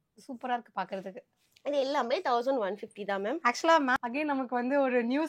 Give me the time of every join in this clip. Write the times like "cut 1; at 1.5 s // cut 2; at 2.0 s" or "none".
cut 1; at 4.0 s